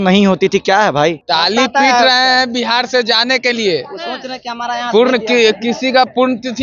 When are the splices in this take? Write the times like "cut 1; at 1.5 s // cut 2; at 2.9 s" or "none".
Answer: cut 1; at 1.2 s